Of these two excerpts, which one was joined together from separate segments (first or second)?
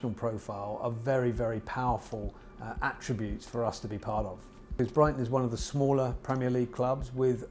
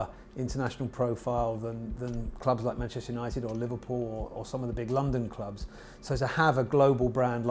first